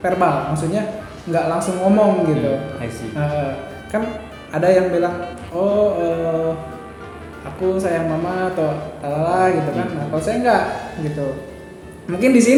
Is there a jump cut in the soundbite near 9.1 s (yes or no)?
no